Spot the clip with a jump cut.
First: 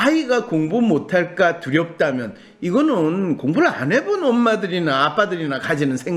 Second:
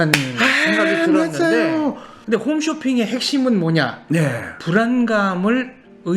second; 1 cut; at 2.1 s

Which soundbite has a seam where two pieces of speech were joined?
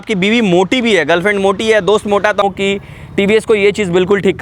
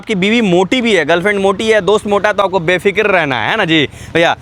first; 1 cut; at 2.4 s

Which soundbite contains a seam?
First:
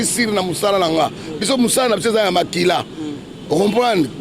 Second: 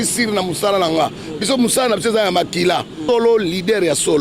second; 1 cut; at 3.0 s

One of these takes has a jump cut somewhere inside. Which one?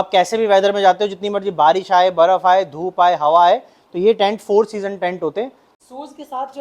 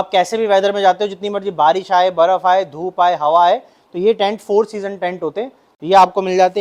first; 1 cut; at 5.6 s

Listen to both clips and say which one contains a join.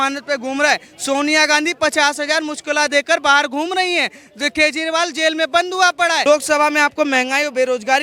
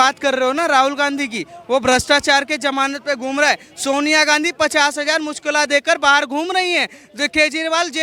first; 1 cut; at 6.2 s

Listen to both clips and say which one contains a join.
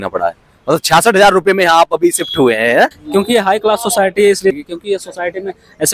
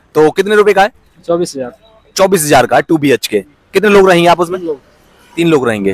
first; 2 cuts; at 3.0 s, 4.5 s

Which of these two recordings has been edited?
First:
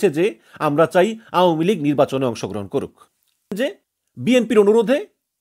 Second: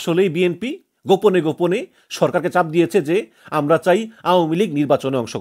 first; 1 cut; at 3.5 s

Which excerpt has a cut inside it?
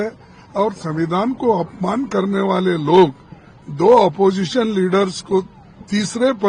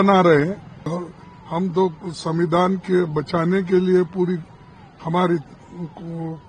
second; 1 cut; at 0.9 s

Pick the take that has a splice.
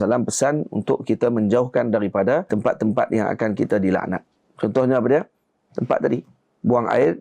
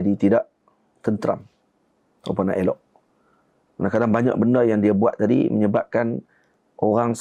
first; 1 cut; at 2.5 s

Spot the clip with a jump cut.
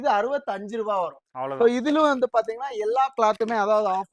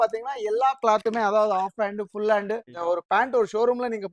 second; 1 cut; at 2.7 s

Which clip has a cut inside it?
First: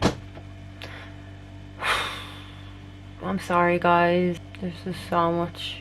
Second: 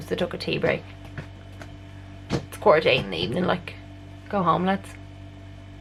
first; 1 cut; at 4.4 s

